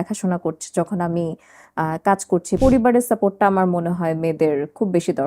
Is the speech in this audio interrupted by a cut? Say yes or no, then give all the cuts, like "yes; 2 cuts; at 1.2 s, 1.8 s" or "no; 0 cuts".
yes; 1 cut; at 2.6 s